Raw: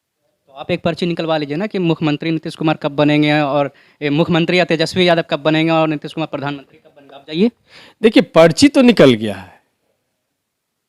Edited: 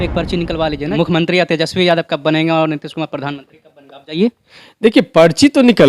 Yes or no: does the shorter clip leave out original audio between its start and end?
yes